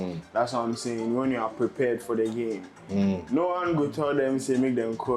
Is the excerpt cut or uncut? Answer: uncut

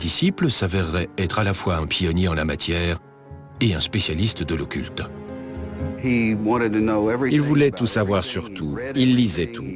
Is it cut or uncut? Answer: uncut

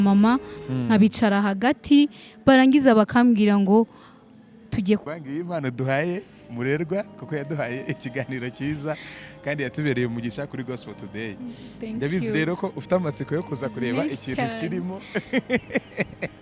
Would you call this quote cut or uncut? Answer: cut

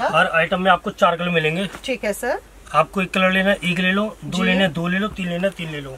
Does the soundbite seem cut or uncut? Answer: uncut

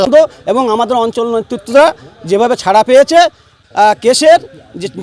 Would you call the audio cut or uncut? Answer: cut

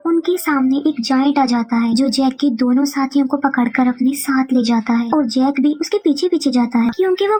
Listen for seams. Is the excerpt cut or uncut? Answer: uncut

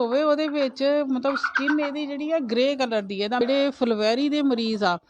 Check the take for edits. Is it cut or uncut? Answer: cut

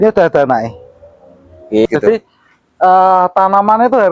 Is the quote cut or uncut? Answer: cut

